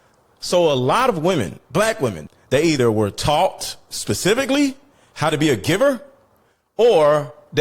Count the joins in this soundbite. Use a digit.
1